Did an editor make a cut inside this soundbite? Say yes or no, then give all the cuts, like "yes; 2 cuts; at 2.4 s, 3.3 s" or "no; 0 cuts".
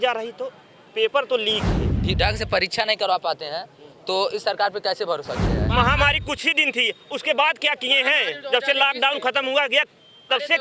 yes; 2 cuts; at 2.0 s, 5.6 s